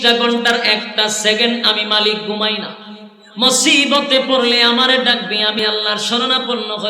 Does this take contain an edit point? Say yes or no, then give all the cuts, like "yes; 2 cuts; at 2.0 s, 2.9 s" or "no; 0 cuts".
yes; 1 cut; at 5.6 s